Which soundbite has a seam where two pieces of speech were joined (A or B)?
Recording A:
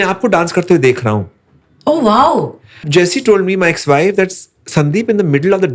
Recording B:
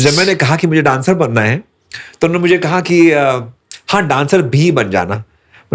A